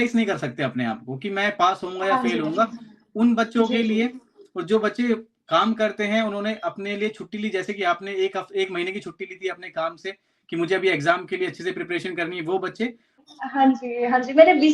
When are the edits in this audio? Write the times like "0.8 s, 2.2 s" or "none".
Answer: 13.3 s